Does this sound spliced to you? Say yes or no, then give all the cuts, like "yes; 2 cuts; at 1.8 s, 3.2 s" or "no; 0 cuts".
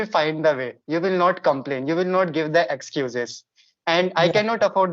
no; 0 cuts